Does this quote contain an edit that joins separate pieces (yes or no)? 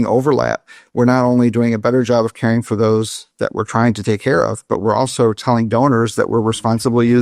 no